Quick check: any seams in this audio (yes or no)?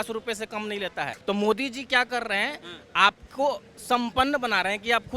yes